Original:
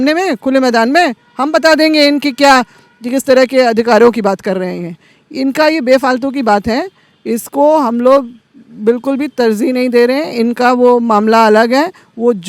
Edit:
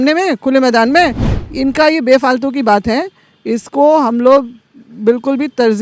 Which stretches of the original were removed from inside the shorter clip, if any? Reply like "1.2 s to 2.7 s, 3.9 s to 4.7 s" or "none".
1.3 s to 5.1 s